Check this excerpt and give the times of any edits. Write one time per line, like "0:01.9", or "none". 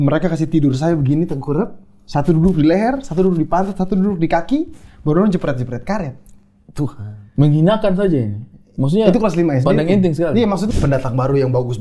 0:10.7